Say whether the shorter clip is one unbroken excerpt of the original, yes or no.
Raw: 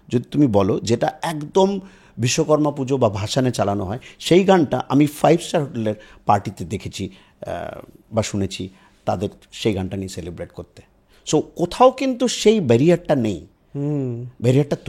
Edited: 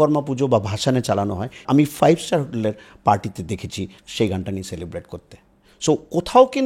no